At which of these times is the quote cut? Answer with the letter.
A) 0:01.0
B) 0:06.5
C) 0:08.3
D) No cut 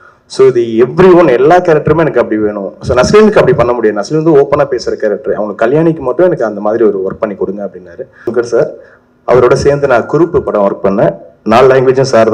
C